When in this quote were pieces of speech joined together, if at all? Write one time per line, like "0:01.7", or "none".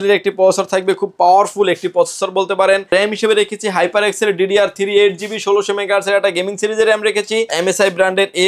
0:02.9
0:07.5